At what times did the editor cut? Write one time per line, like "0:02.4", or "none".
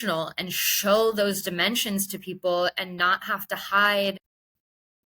0:04.1